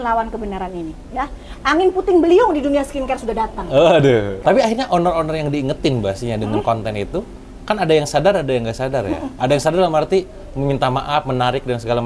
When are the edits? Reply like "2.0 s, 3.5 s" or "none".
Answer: 4.4 s